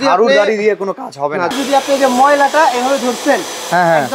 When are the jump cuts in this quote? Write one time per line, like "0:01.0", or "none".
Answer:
0:01.5